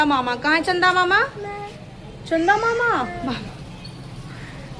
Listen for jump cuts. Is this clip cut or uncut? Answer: cut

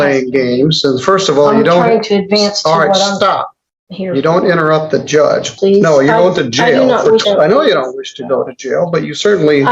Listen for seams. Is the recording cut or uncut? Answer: cut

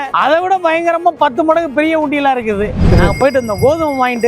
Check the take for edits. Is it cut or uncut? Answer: cut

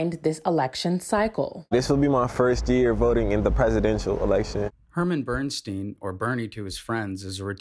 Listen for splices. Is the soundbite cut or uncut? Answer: cut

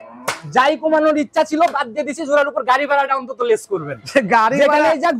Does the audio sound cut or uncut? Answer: uncut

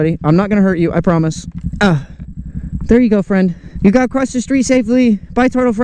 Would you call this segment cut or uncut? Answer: cut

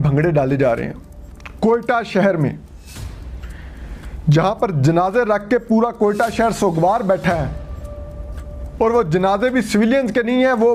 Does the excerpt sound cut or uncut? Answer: uncut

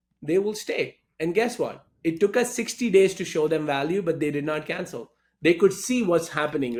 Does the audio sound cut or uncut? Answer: uncut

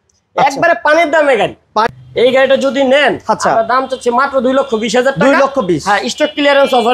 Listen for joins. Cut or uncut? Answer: cut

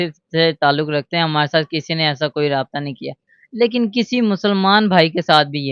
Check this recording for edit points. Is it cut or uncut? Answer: uncut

